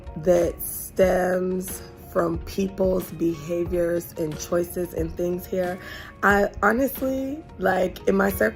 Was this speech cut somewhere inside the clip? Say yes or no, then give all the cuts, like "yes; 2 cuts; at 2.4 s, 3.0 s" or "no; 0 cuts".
no; 0 cuts